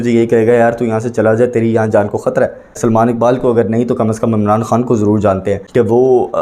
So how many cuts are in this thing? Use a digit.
2